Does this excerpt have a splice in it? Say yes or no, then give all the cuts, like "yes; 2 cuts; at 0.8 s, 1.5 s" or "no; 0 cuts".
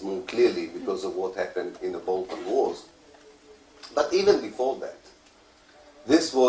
yes; 1 cut; at 5.5 s